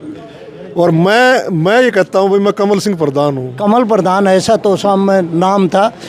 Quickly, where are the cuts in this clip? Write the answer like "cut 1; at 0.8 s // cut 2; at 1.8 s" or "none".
cut 1; at 3.6 s